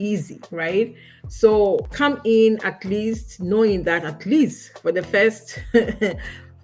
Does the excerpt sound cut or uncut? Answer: uncut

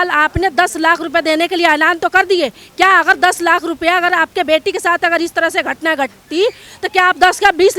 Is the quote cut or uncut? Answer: uncut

